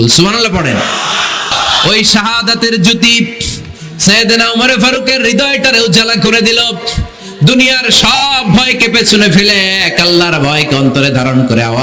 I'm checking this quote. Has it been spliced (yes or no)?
yes